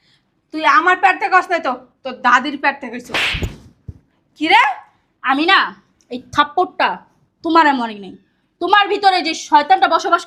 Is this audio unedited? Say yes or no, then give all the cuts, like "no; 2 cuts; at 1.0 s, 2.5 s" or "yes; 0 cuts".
yes; 0 cuts